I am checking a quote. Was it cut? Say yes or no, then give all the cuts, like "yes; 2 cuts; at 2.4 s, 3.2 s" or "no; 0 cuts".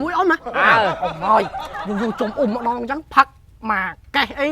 yes; 1 cut; at 1.1 s